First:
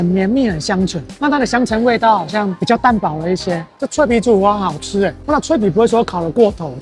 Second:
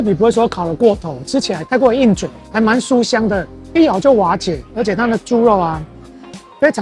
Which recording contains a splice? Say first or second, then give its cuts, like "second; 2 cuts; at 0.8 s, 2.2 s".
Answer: first; 2 cuts; at 1.1 s, 3.7 s